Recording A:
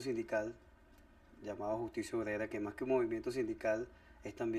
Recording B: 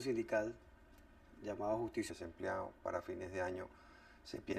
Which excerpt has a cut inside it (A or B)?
A